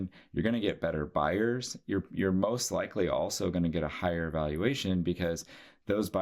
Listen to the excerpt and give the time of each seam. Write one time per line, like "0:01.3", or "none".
none